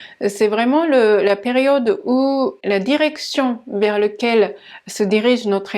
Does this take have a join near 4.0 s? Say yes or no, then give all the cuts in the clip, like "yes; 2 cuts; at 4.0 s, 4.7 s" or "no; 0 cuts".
no; 1 cut; at 2.6 s